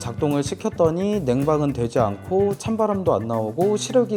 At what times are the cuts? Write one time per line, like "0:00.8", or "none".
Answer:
none